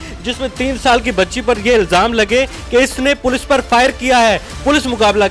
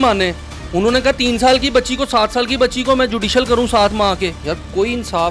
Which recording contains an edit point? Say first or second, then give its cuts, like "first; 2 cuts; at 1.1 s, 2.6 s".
second; 1 cut; at 4.4 s